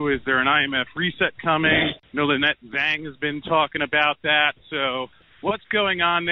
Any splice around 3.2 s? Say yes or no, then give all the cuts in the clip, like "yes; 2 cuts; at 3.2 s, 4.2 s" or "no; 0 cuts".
no; 2 cuts; at 1.9 s, 5.2 s